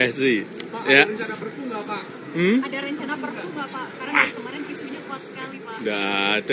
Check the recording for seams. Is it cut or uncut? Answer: uncut